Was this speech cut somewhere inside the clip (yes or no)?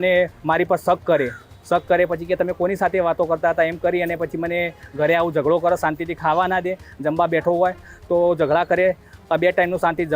no